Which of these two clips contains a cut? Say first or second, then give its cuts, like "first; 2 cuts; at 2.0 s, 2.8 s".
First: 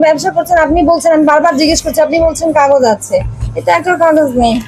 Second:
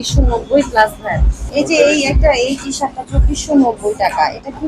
second; 1 cut; at 1.4 s